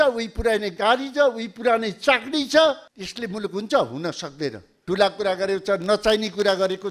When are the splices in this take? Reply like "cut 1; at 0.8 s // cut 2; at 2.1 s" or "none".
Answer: cut 1; at 4.7 s